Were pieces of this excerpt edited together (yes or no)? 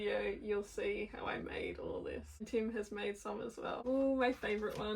yes